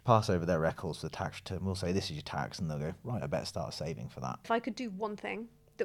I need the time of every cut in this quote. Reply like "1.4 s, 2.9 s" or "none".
4.5 s